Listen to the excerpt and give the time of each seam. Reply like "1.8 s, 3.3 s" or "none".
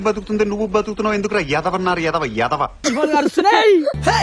2.8 s